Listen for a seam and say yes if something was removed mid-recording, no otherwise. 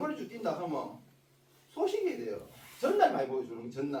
no